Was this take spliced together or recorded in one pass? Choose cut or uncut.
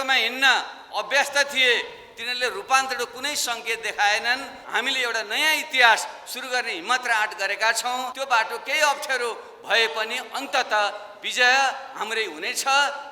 cut